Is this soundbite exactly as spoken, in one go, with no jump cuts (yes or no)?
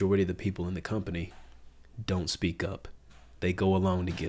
yes